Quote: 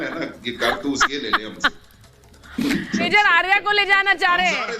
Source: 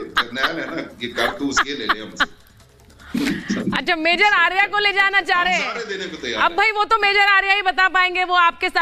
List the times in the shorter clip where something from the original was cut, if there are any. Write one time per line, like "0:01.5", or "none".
0:03.1